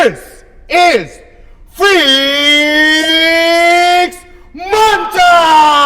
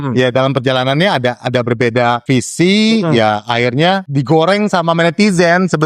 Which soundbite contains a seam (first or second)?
second